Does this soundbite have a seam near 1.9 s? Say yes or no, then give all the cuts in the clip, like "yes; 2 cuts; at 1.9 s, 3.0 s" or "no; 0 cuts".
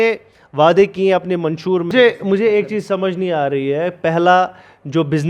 yes; 1 cut; at 1.9 s